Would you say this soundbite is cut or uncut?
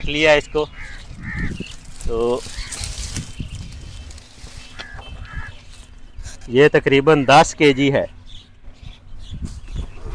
uncut